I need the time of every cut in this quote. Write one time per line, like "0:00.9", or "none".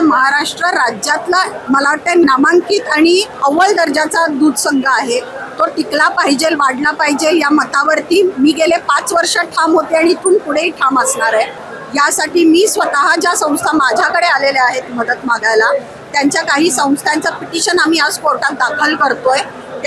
0:01.6
0:03.3
0:11.6